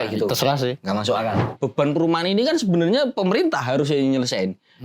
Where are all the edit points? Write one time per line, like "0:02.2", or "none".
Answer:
0:01.6